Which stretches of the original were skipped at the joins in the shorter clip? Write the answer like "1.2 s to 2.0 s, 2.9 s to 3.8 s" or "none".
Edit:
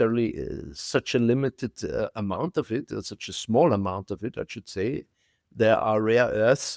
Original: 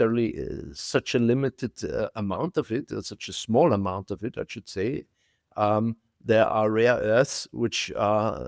5.4 s to 6.1 s